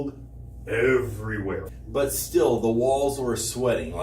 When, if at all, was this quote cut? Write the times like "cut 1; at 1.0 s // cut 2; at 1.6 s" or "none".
cut 1; at 1.7 s